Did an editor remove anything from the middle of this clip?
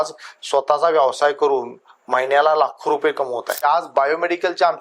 yes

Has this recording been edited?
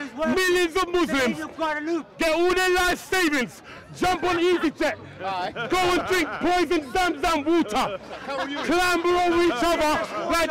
no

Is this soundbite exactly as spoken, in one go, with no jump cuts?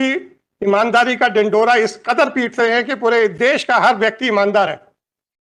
yes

